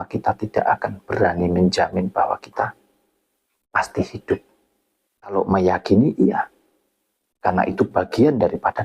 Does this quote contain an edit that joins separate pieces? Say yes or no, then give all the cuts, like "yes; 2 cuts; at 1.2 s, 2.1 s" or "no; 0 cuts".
yes; 1 cut; at 5.3 s